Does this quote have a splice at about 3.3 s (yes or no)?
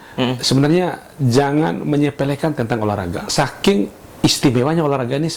yes